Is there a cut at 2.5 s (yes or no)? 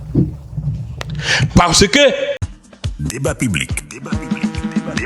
yes